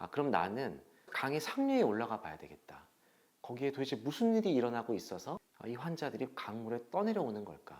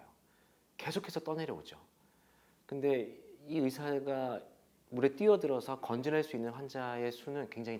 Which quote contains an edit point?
first; 2 cuts; at 1.1 s, 5.5 s

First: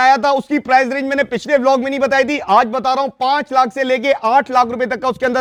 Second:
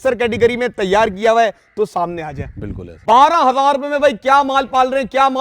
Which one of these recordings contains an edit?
second; 1 cut; at 3.0 s

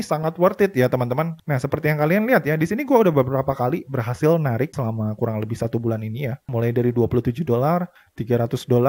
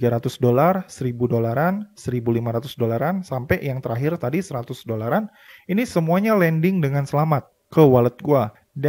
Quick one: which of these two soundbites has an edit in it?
first; 2 cuts; at 1.4 s, 4.7 s

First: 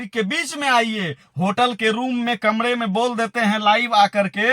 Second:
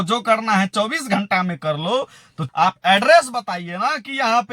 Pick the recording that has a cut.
second; 1 cut; at 2.4 s

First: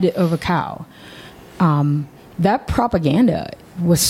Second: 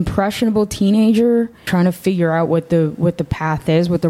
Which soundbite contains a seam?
second; 1 cut; at 1.7 s

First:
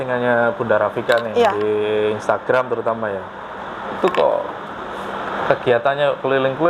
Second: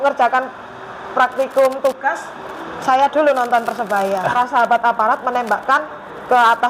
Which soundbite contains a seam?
second; 1 cut; at 4.3 s

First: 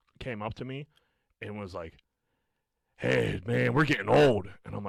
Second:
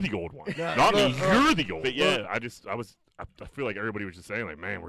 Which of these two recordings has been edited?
second; 1 cut; at 1.8 s

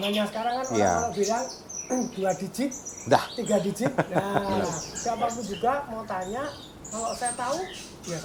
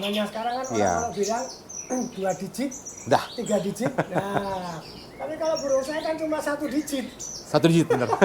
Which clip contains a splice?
first; 1 cut; at 4.5 s

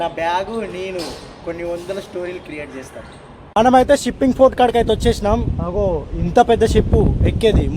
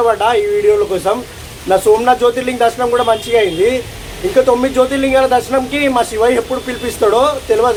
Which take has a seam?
first; 1 cut; at 3.2 s

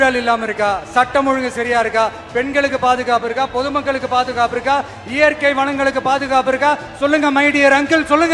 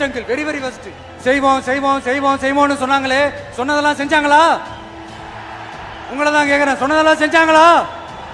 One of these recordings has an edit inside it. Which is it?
second; 1 cut; at 1.1 s

